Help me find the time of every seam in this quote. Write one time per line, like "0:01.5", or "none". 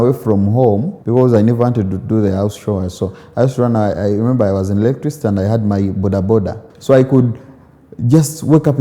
0:00.9
0:06.7